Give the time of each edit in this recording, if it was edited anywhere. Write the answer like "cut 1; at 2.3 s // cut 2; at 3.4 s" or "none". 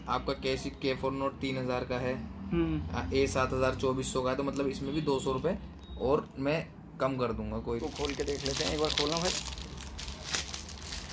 cut 1; at 7.7 s